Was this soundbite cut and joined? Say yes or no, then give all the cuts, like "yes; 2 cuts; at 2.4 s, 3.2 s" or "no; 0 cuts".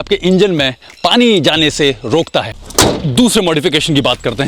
yes; 1 cut; at 2.6 s